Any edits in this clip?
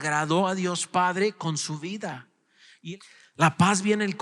yes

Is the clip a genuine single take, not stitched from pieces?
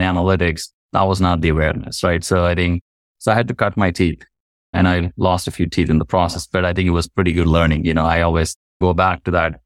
yes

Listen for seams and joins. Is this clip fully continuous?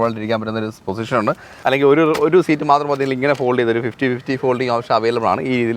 no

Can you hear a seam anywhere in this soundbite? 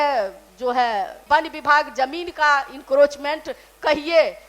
yes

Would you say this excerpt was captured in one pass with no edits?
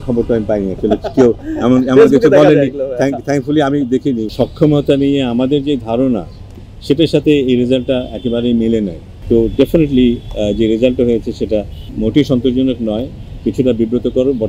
no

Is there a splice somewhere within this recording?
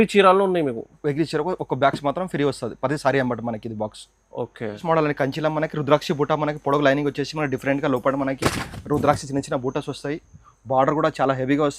yes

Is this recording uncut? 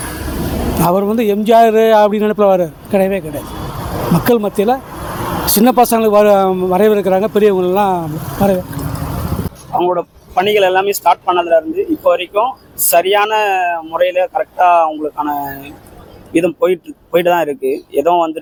yes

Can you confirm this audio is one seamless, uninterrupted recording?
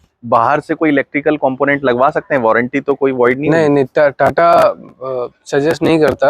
yes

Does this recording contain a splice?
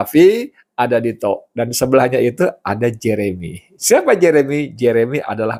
no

